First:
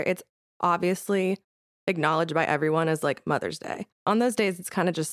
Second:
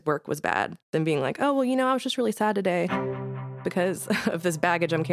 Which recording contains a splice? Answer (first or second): first